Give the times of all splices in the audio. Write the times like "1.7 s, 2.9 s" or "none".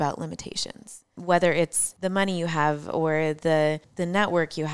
1.1 s, 1.8 s, 3.9 s